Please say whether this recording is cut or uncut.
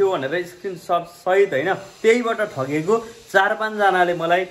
uncut